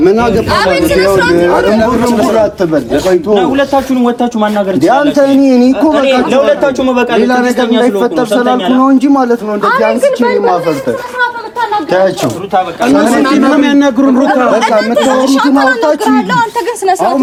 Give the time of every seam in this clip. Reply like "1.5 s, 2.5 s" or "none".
none